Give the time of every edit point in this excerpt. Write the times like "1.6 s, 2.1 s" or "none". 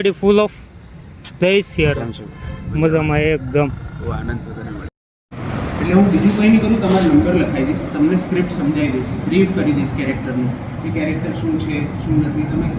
4.9 s